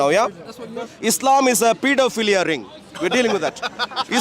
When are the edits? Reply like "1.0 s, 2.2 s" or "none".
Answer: 0.9 s